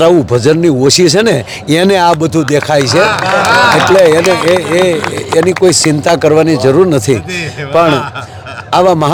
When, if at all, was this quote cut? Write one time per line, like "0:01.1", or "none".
none